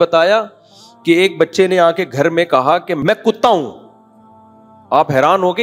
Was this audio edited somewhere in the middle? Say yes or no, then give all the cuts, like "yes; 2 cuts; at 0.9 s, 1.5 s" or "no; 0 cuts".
yes; 1 cut; at 3.0 s